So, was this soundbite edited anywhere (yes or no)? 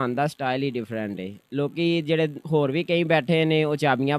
no